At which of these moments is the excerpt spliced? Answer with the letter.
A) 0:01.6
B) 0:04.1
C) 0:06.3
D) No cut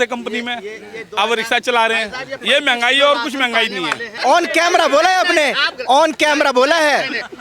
B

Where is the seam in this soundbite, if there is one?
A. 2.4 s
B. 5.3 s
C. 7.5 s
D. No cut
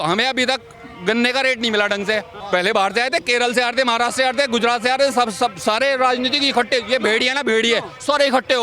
A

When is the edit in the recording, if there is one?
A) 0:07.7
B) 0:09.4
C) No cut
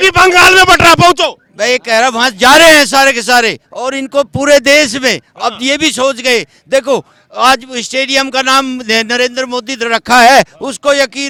C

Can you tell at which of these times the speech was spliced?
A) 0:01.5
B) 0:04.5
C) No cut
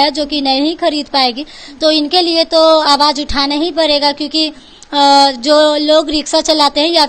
C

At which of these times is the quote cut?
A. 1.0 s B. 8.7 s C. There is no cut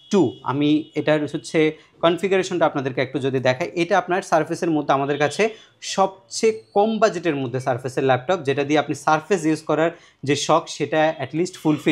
C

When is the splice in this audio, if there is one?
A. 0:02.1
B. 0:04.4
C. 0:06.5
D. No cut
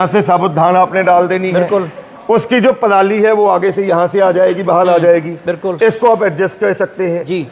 D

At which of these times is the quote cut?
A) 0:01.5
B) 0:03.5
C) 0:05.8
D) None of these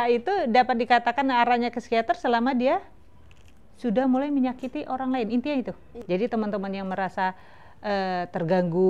C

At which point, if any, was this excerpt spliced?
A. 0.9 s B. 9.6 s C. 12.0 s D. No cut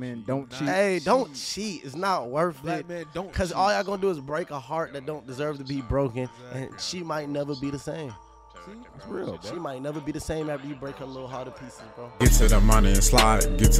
C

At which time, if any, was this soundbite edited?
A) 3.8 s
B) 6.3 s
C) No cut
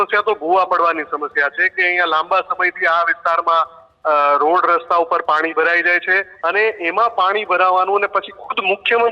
B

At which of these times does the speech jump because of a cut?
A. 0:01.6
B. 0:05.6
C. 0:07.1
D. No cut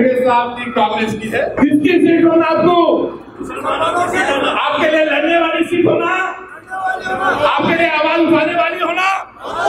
A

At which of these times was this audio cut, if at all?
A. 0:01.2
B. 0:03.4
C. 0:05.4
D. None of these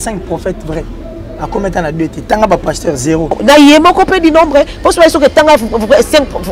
B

